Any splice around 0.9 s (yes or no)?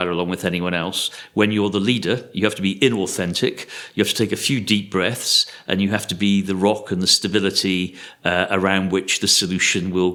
no